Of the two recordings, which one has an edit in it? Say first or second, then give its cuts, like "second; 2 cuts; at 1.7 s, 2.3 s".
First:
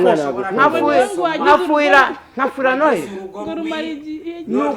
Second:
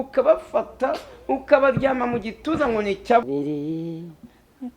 second; 1 cut; at 3.2 s